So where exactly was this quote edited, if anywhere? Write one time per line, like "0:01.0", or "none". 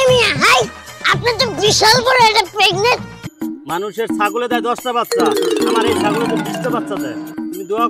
0:03.2